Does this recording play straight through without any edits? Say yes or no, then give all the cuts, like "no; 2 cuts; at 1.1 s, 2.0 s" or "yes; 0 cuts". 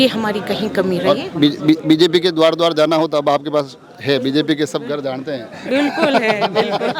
yes; 0 cuts